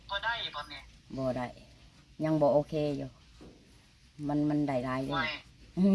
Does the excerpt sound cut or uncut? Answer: uncut